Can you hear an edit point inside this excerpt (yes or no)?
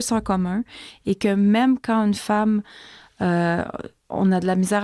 no